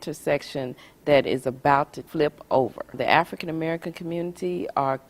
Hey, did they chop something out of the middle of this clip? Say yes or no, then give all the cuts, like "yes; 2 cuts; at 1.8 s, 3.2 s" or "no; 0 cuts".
yes; 2 cuts; at 2.0 s, 3.0 s